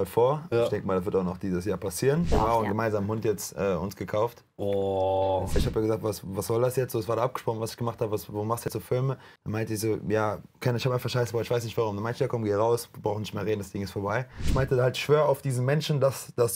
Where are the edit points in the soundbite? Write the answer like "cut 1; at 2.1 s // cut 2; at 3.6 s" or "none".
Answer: cut 1; at 2.3 s // cut 2; at 5.6 s // cut 3; at 9.3 s // cut 4; at 14.5 s